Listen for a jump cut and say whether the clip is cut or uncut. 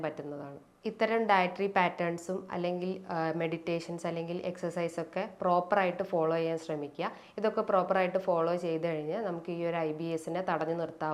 uncut